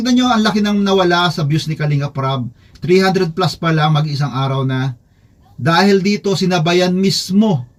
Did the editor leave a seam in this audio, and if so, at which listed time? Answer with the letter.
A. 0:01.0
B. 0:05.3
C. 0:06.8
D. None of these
D